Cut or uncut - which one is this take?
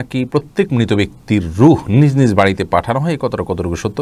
uncut